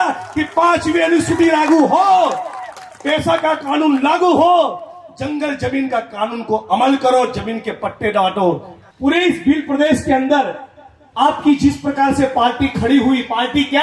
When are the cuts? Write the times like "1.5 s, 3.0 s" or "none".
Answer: 8.7 s